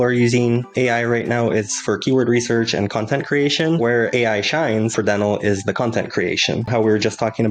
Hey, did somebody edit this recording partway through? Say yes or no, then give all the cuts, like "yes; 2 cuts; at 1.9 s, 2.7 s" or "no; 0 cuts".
yes; 3 cuts; at 3.9 s, 4.9 s, 6.7 s